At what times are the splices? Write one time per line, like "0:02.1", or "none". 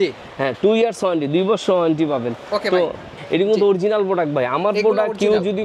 0:03.2

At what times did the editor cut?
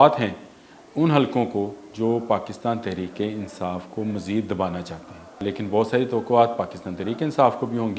0:05.4

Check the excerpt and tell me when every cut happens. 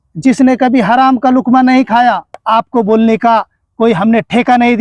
0:02.4

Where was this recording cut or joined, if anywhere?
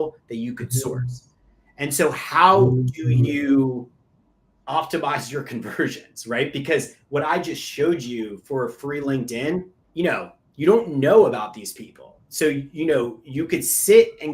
0:09.8

